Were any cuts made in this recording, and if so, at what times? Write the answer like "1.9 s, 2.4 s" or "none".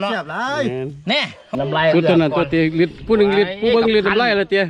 1.6 s